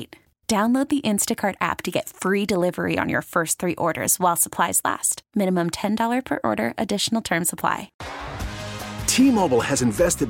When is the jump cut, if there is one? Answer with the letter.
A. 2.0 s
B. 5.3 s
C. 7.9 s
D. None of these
C